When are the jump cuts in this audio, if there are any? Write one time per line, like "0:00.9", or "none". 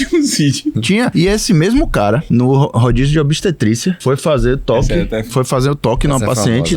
0:00.9
0:02.2
0:04.0
0:05.3